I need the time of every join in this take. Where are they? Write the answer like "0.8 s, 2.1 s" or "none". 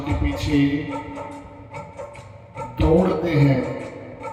none